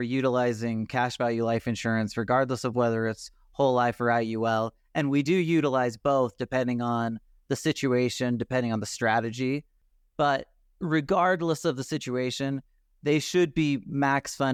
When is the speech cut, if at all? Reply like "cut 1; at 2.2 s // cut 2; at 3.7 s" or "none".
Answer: none